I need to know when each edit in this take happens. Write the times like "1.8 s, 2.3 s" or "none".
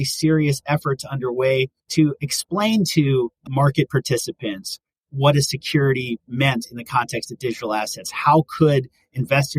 1.8 s